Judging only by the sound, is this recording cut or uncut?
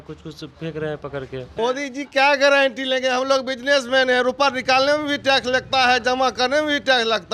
cut